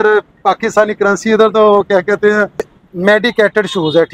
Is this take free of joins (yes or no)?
no